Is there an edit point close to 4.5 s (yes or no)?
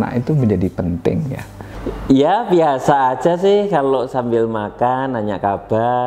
no